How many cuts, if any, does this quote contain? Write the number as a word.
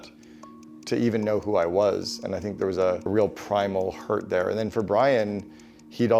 one